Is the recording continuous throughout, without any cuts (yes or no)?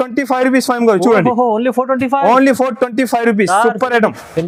yes